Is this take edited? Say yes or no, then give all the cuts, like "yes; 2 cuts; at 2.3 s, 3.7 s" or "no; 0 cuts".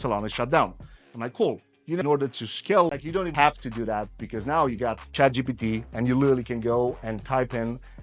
yes; 1 cut; at 3.0 s